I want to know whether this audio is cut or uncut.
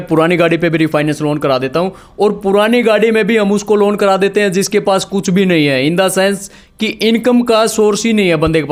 uncut